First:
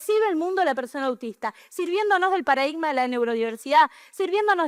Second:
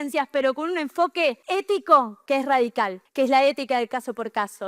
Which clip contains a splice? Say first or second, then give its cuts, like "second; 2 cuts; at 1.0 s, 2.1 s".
second; 3 cuts; at 1.4 s, 2.2 s, 3.0 s